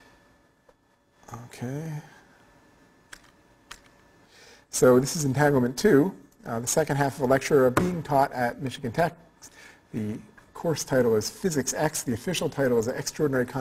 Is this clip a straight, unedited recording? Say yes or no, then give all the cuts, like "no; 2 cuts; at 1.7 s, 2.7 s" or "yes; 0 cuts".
no; 1 cut; at 8.5 s